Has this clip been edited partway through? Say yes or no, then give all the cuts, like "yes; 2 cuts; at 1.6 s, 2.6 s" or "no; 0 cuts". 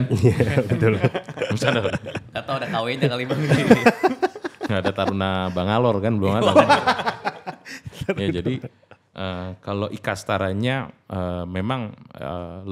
no; 0 cuts